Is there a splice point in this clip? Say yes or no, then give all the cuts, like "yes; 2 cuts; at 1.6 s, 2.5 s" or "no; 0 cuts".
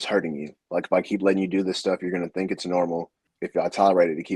yes; 1 cut; at 3.4 s